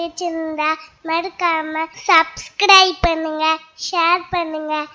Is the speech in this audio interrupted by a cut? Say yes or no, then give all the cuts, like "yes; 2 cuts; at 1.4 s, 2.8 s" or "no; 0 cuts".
yes; 1 cut; at 1.9 s